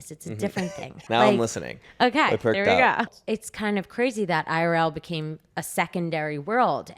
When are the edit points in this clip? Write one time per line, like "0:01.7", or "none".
0:01.0
0:03.1